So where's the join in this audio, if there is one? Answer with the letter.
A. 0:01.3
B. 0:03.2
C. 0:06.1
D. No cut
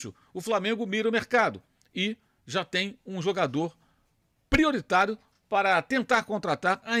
D